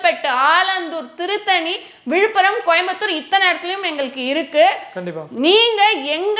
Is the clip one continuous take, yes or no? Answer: yes